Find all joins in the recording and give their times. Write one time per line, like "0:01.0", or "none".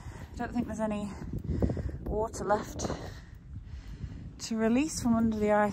none